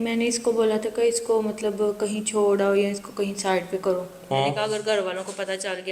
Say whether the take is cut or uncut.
cut